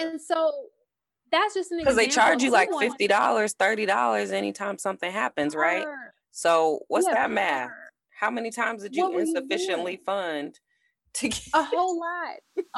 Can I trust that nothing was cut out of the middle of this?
yes; 0 cuts

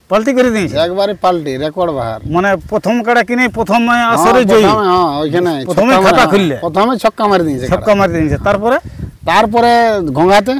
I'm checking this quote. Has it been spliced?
no; 0 cuts

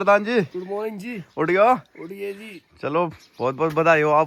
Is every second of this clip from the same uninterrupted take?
yes; 0 cuts

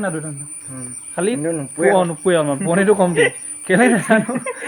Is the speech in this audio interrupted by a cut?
no; 0 cuts

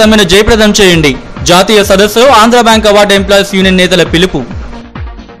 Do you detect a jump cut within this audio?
no; 0 cuts

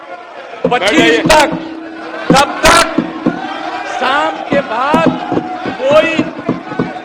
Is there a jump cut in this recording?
no; 0 cuts

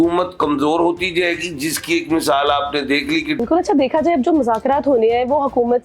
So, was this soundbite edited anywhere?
yes; 1 cut; at 3.4 s

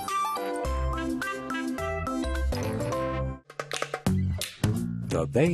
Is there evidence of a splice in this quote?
yes; 1 cut; at 3.5 s

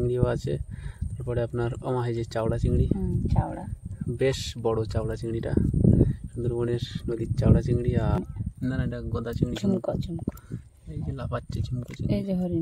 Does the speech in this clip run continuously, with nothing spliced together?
no; 1 cut; at 8.2 s

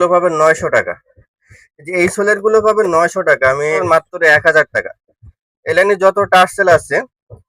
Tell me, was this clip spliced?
yes; 1 cut; at 3.8 s

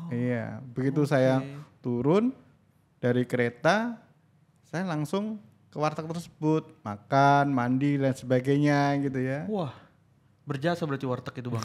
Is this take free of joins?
yes; 0 cuts

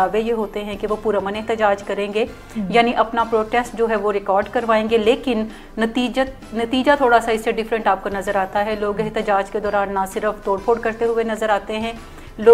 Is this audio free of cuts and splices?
yes; 0 cuts

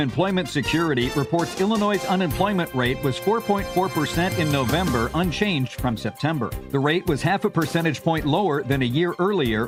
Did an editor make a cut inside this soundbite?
no; 0 cuts

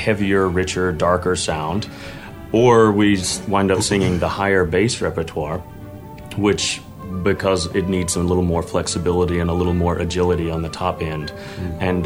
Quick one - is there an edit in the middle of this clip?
yes; 1 cut; at 7.0 s

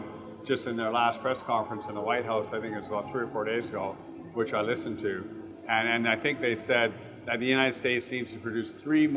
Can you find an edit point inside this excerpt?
no; 0 cuts

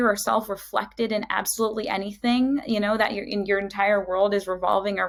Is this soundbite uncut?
yes; 0 cuts

